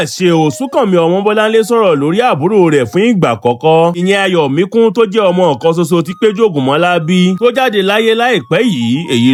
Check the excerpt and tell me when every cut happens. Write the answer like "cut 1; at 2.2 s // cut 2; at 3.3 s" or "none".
none

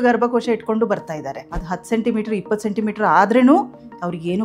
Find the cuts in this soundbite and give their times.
cut 1; at 1.4 s

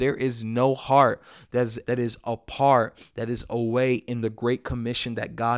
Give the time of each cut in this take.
cut 1; at 1.8 s

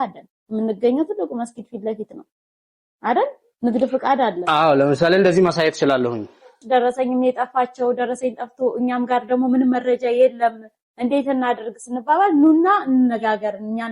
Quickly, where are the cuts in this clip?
cut 1; at 6.6 s

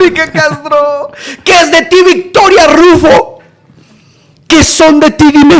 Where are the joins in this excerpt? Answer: none

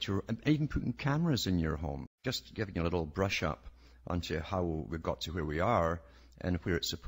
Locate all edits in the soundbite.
none

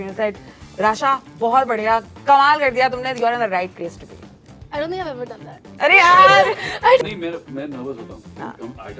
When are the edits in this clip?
cut 1; at 7.0 s

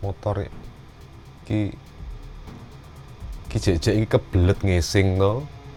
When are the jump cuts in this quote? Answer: none

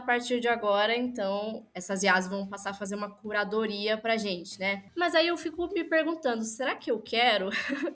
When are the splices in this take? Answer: cut 1; at 1.7 s // cut 2; at 4.8 s

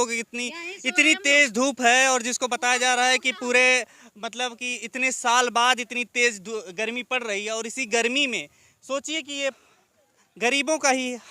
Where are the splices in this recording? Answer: cut 1; at 9.6 s

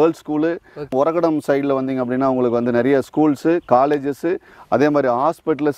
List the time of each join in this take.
none

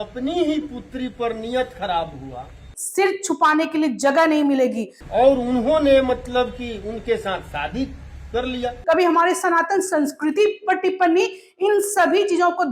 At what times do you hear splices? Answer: cut 1; at 2.7 s // cut 2; at 4.9 s // cut 3; at 8.8 s

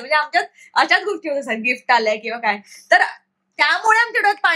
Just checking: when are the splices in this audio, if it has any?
none

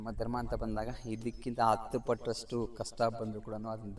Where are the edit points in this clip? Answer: none

